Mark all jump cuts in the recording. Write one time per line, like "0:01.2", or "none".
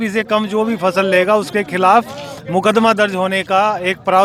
none